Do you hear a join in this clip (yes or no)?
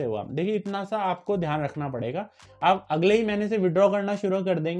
yes